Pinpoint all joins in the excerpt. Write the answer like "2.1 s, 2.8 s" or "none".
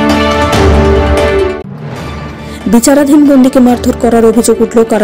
1.5 s

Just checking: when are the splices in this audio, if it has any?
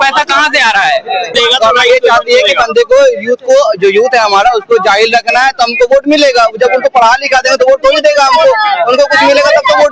1.3 s

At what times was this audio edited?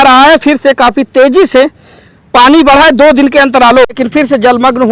3.9 s

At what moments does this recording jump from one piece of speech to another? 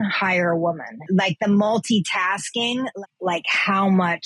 1.0 s, 3.0 s

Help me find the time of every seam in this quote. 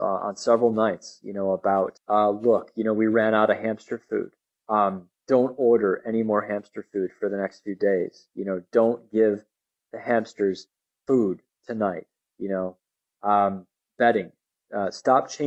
2.0 s

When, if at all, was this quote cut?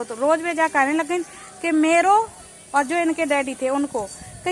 none

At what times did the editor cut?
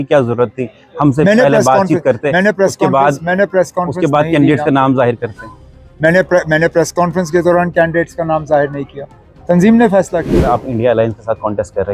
10.5 s

